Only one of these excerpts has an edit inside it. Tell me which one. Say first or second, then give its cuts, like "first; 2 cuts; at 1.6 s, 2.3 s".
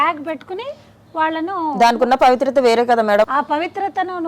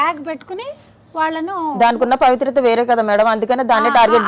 first; 1 cut; at 3.2 s